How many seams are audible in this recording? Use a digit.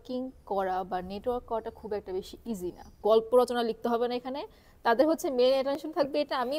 1